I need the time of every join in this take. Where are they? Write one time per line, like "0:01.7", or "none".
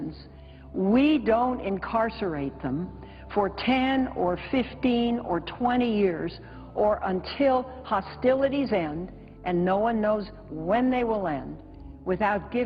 0:01.6

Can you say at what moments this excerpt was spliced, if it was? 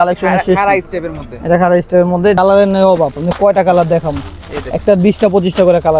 0:02.4

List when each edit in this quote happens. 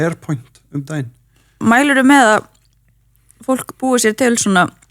0:01.6

